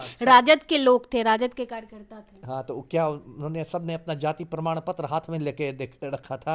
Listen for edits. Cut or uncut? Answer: uncut